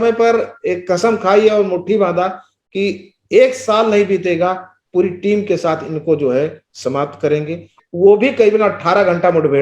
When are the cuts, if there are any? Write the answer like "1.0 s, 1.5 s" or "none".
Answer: 7.8 s